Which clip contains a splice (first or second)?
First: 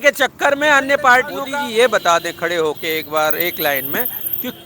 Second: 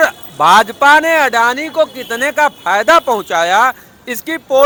first